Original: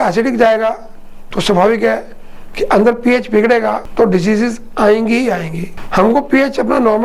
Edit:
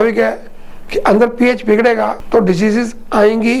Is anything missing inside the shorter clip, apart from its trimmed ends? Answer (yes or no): no